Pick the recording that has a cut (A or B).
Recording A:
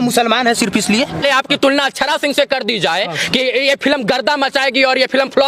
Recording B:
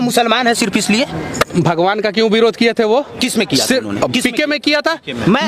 A